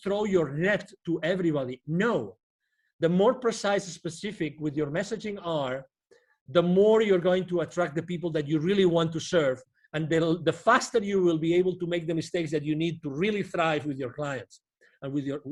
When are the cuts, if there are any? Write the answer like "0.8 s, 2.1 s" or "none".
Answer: none